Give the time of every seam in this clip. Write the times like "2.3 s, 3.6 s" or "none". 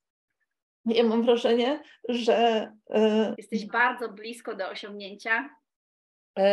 3.4 s

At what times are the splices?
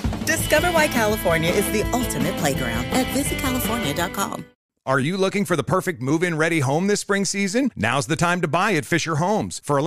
4.5 s

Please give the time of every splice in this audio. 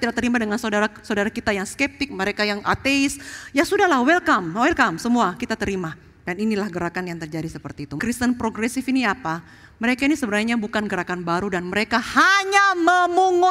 7.9 s

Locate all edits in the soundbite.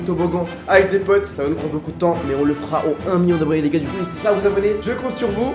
1.3 s, 4.8 s

